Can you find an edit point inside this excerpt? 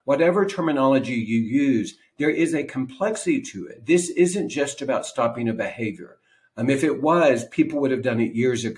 yes; 1 cut; at 3.7 s

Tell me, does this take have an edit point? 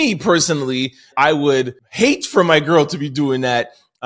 yes; 2 cuts; at 1.1 s, 1.8 s

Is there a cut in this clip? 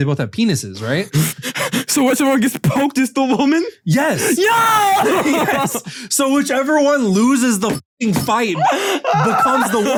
no; 0 cuts

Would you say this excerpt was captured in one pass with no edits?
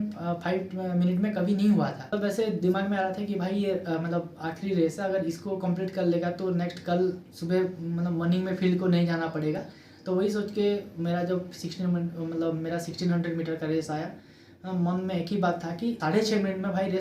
yes; 0 cuts

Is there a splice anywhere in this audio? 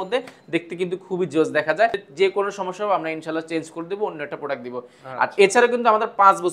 yes; 1 cut; at 2.0 s

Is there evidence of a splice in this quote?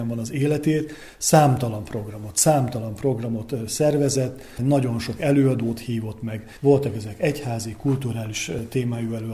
no; 0 cuts

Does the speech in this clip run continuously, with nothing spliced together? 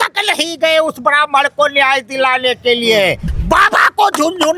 no; 1 cut; at 3.3 s

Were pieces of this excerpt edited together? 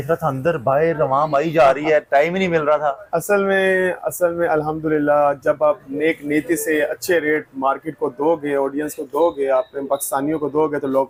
no; 0 cuts

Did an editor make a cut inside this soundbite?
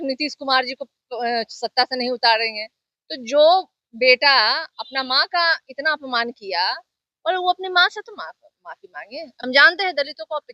yes; 1 cut; at 9.3 s

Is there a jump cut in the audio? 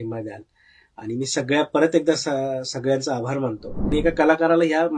yes; 1 cut; at 3.9 s

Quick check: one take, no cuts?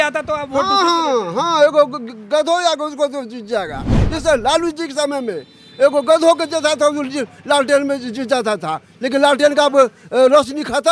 yes; 0 cuts

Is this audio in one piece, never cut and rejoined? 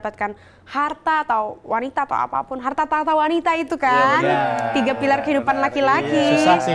yes; 0 cuts

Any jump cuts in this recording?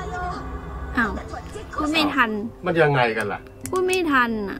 no; 0 cuts

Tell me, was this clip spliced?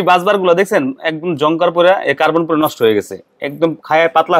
no; 0 cuts

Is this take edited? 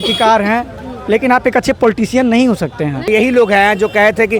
yes; 1 cut; at 3.1 s

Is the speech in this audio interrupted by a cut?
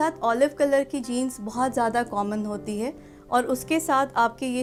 no; 0 cuts

